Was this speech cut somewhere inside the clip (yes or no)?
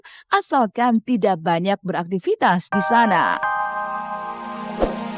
yes